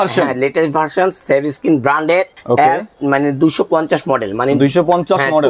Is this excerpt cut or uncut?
uncut